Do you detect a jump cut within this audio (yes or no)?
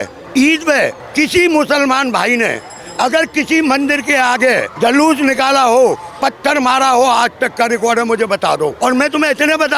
yes